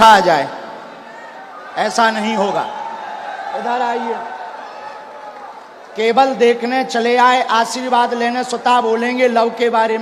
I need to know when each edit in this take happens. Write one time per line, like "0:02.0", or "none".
none